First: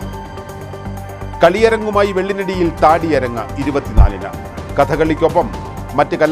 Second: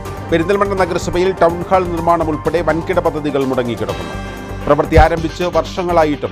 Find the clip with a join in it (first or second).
first